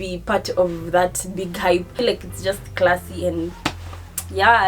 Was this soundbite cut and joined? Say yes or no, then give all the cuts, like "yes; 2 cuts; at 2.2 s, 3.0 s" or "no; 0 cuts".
yes; 1 cut; at 1.9 s